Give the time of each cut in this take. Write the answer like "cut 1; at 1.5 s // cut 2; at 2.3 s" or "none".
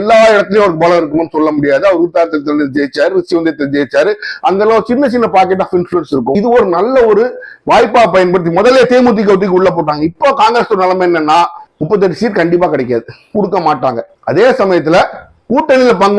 cut 1; at 6.3 s